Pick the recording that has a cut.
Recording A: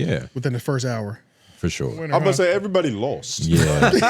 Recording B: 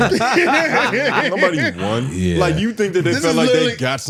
A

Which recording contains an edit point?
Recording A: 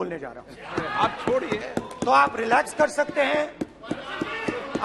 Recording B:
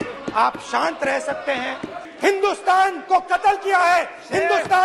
B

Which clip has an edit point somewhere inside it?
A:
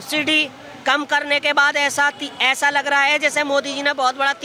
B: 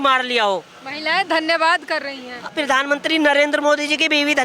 B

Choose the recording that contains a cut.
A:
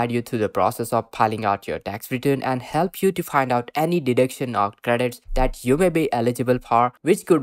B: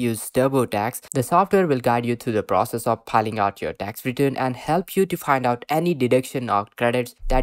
B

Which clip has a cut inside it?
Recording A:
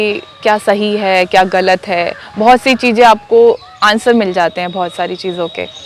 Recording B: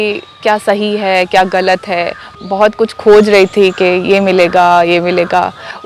B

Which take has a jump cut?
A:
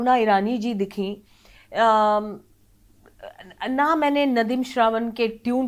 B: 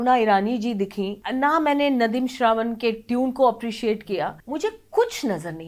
B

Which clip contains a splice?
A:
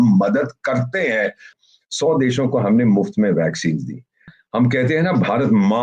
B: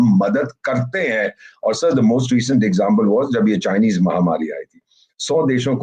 A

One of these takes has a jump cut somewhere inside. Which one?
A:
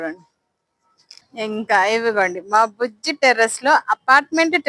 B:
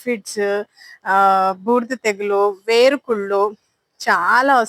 A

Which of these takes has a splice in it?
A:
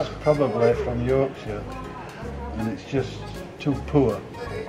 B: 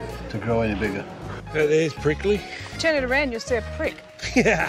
B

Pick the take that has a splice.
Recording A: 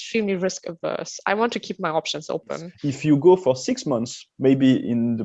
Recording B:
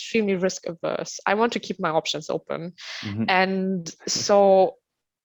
A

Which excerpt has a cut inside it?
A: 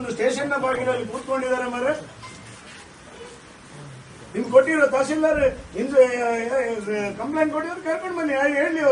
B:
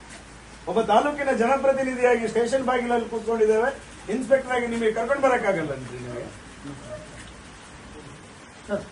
A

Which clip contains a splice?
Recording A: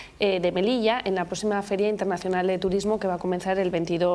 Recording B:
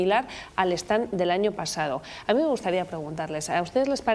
B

